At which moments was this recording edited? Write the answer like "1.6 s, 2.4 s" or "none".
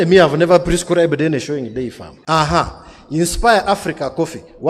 2.1 s

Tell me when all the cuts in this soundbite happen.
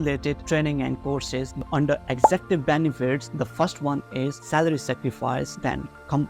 1.5 s

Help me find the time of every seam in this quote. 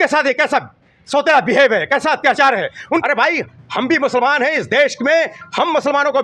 3.0 s

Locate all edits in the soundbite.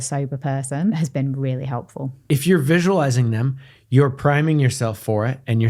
1.0 s, 2.2 s

